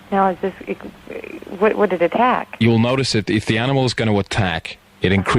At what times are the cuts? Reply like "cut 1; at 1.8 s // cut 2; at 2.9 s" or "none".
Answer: cut 1; at 4.0 s